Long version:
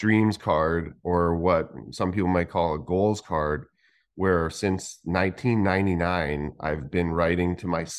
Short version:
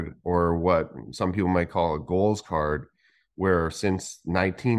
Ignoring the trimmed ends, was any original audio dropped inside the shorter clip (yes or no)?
no